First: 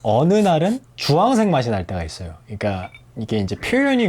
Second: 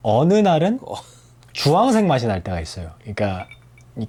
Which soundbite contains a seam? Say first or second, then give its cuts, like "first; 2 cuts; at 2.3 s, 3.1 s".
first; 2 cuts; at 0.9 s, 3.0 s